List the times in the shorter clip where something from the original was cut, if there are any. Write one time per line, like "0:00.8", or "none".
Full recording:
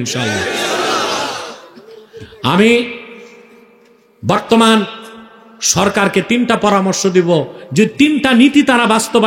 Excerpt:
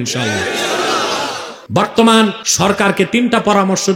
0:01.5
0:02.4